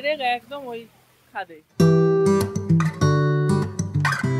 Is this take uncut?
yes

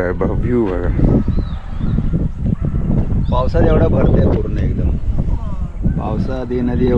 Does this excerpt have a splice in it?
no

